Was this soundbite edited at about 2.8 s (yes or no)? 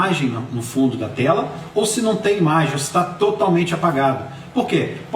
no